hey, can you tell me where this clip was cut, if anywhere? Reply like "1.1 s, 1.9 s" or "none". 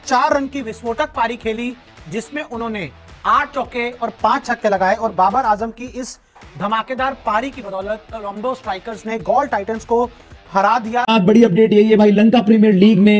11.0 s